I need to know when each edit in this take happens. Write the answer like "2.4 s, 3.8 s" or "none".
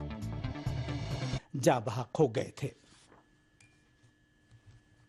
none